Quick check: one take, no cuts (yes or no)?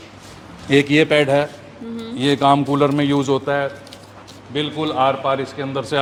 yes